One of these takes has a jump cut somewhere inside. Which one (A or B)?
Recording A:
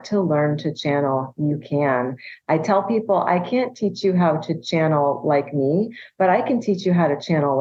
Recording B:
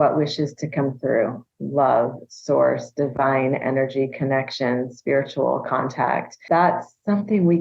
B